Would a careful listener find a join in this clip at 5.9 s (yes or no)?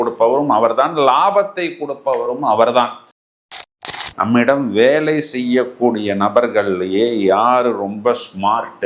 no